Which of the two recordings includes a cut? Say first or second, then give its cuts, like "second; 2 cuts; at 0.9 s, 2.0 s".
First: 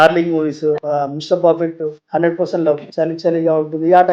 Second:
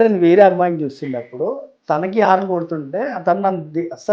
first; 3 cuts; at 0.8 s, 2.0 s, 2.9 s